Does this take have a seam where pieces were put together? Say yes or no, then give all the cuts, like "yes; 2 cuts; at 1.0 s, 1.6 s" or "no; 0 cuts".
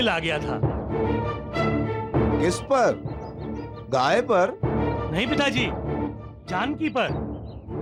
no; 0 cuts